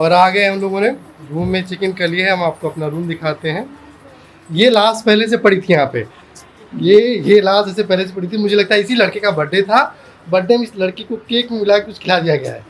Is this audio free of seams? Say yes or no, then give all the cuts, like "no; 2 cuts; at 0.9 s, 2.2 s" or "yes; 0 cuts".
yes; 0 cuts